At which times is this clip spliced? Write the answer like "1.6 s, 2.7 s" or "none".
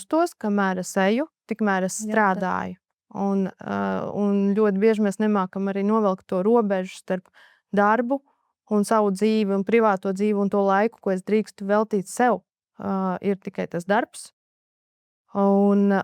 none